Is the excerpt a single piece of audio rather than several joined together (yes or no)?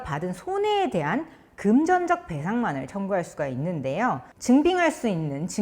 no